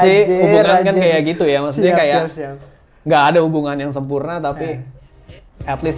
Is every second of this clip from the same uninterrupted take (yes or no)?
yes